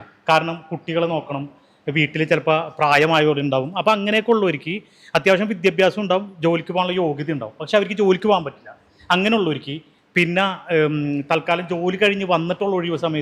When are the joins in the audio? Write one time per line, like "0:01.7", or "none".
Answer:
none

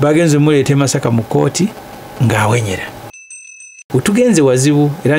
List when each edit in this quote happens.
0:03.2

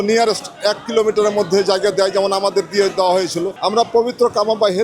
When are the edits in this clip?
0:03.6

